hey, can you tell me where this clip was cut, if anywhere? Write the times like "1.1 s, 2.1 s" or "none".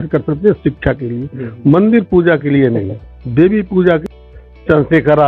4.1 s